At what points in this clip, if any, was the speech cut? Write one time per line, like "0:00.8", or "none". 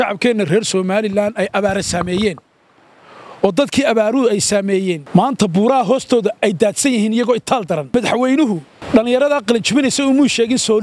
0:05.0
0:07.9
0:08.7